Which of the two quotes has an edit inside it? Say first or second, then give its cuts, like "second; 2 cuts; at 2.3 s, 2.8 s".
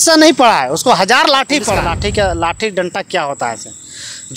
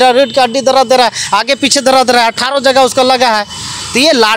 first; 1 cut; at 2.0 s